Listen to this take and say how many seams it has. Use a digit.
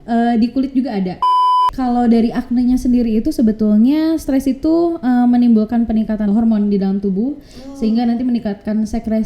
2